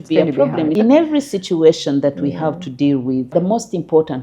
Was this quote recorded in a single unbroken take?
no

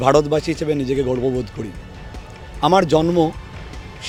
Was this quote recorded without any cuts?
yes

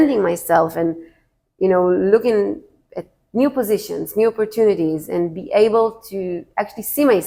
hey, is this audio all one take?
yes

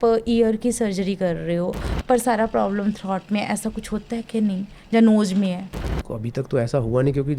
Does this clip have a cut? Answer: no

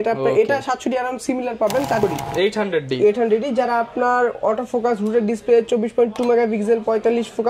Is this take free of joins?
no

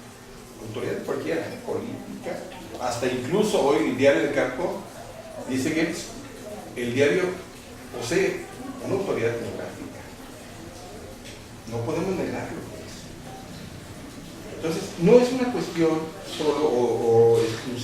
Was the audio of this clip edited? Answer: yes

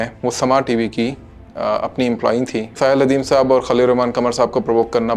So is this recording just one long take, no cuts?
no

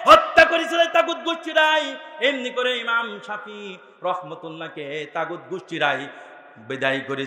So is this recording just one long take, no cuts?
yes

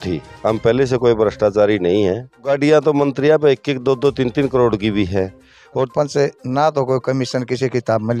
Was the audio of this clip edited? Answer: yes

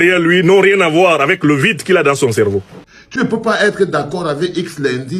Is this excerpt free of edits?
no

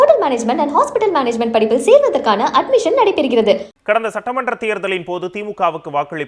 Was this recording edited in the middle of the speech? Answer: yes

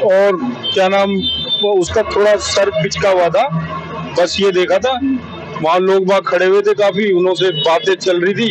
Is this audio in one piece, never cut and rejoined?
yes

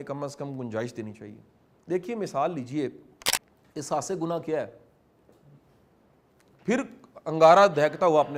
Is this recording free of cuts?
yes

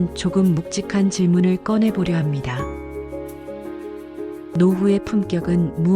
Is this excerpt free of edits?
no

